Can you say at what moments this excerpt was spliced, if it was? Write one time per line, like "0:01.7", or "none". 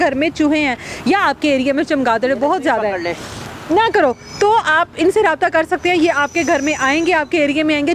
none